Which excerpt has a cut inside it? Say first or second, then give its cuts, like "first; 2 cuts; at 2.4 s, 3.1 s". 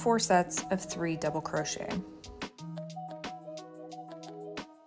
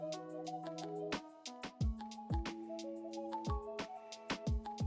first; 1 cut; at 2.1 s